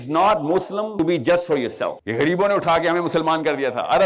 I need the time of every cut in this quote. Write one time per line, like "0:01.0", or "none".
0:00.9
0:02.0